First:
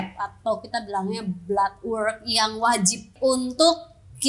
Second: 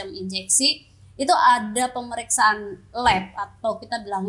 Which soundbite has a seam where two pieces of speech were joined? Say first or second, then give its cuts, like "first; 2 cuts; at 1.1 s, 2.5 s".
first; 1 cut; at 3.1 s